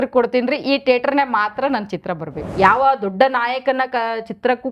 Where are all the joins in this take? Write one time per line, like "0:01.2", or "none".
0:02.3